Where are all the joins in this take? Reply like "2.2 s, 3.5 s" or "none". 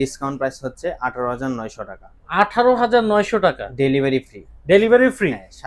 none